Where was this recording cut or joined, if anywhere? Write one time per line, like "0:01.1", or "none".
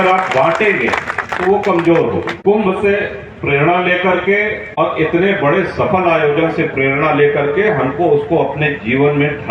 0:02.3
0:04.6

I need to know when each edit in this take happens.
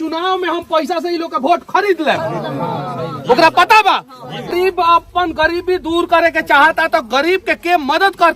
0:04.5

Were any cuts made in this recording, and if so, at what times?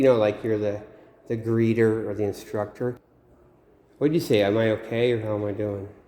0:03.1

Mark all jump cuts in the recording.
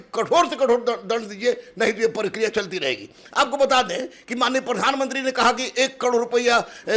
none

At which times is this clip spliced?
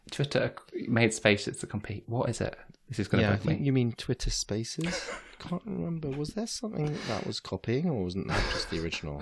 none

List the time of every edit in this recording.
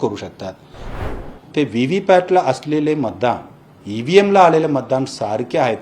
0:00.9

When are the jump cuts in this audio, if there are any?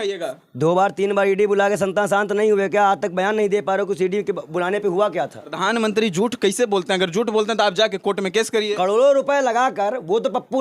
0:05.4

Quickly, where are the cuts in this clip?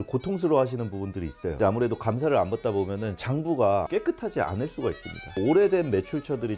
0:03.9
0:05.4

